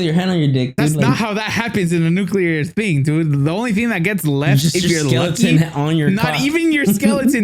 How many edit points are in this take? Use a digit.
0